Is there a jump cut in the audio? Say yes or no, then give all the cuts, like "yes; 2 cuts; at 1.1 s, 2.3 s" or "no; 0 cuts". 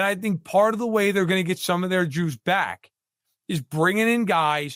no; 0 cuts